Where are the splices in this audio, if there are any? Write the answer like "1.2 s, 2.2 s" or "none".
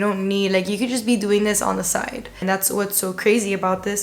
2.4 s